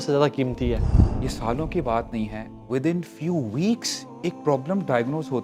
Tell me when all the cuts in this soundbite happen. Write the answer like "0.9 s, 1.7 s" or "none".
0.9 s